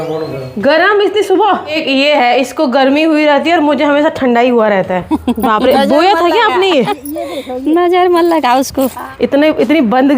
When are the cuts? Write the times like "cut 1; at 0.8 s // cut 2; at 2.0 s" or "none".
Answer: cut 1; at 1.8 s // cut 2; at 5.0 s // cut 3; at 9.0 s